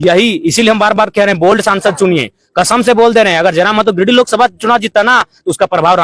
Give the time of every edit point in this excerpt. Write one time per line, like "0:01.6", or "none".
none